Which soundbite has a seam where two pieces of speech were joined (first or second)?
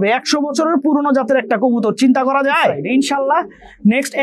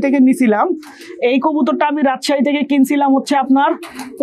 first